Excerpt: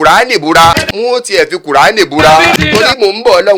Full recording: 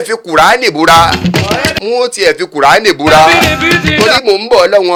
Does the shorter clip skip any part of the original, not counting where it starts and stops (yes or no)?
yes